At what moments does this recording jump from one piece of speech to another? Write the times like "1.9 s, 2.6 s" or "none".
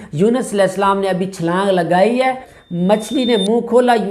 2.5 s